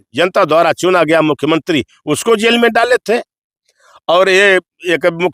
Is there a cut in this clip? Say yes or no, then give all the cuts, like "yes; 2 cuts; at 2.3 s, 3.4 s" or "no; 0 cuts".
no; 0 cuts